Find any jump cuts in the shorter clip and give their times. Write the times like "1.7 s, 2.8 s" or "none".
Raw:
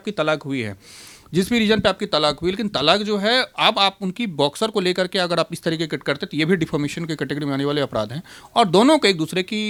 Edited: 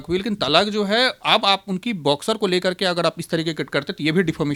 none